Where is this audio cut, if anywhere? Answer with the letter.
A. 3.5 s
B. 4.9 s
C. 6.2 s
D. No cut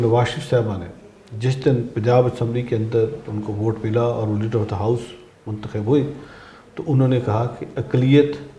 D